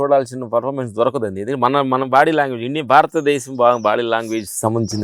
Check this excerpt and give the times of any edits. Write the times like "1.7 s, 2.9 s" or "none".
none